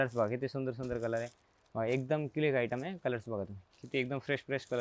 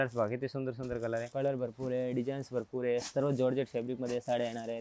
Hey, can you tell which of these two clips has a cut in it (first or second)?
second